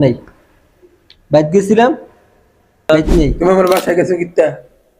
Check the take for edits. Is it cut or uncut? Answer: cut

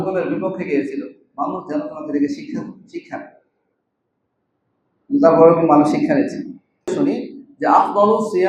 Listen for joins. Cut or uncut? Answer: cut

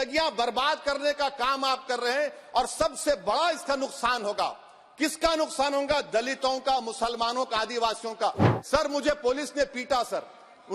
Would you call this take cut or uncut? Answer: cut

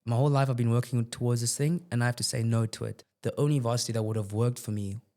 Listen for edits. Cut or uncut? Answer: cut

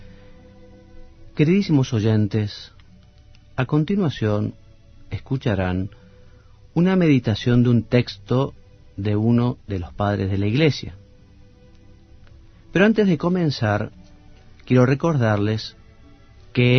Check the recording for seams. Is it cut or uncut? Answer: cut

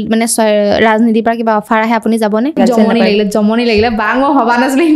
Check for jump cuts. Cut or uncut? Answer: cut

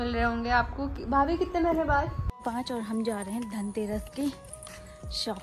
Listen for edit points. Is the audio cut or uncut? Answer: cut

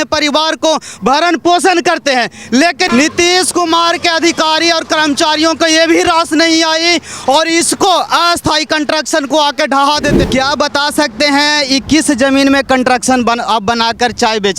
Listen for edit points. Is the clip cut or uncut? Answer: cut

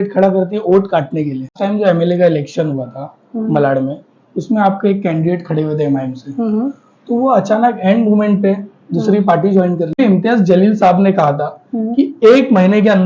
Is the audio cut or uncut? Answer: cut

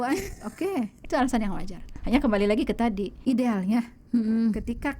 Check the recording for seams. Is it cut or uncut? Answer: cut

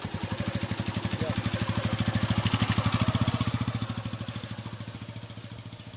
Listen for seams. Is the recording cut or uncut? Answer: uncut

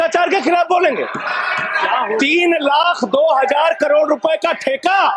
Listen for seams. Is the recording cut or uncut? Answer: uncut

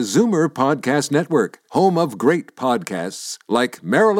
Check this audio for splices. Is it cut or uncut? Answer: uncut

